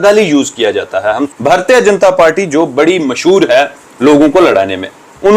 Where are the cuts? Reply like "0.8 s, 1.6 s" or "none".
1.3 s